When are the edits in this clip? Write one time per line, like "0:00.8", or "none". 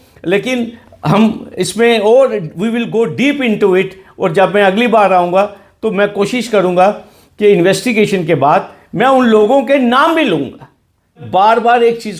0:11.2